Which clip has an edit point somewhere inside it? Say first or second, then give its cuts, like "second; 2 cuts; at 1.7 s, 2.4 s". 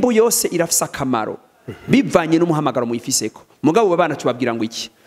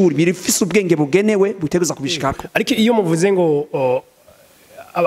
second; 1 cut; at 2.4 s